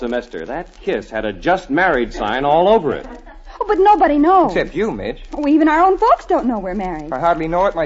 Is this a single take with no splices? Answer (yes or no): no